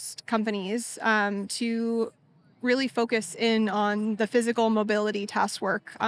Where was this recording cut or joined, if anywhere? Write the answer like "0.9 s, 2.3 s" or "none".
none